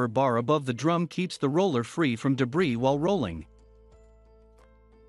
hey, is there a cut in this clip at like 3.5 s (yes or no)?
yes